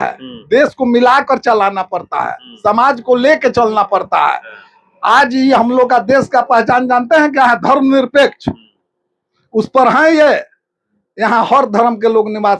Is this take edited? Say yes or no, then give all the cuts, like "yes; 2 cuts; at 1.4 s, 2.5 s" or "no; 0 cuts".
no; 0 cuts